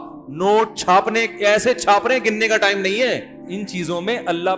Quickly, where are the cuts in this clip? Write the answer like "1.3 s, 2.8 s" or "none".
3.4 s